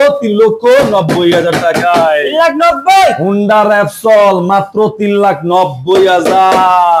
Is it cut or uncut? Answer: uncut